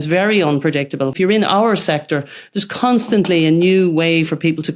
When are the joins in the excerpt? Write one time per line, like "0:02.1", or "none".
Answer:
0:01.1